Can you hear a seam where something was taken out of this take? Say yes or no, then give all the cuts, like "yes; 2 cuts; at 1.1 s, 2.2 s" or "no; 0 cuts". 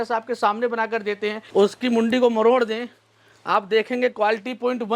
yes; 1 cut; at 1.4 s